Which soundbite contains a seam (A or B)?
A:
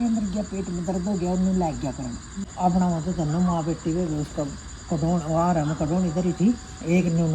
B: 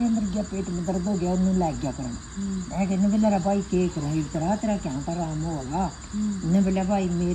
A